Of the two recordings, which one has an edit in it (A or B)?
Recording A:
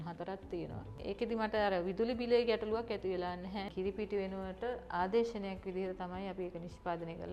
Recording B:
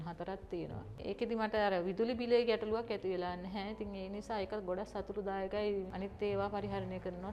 A